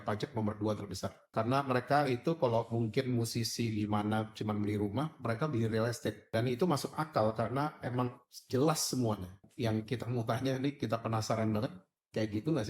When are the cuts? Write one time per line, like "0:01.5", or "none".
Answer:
0:01.1
0:06.2
0:09.4